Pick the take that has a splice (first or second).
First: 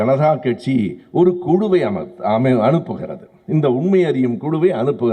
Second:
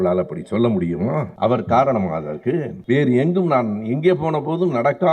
second